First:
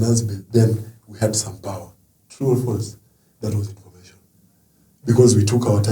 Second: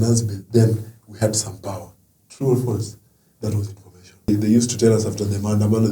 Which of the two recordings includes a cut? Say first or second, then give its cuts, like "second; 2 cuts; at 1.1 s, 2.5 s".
second; 1 cut; at 4.3 s